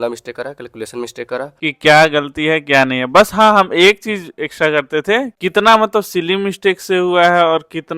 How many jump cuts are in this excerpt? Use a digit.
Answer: 2